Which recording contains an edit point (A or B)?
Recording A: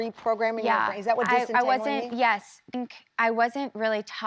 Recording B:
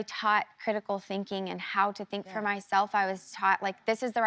A